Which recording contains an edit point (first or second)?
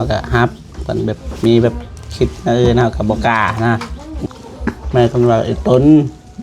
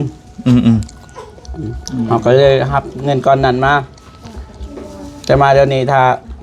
first